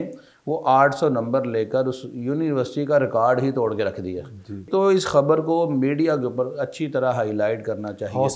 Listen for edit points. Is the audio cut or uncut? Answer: cut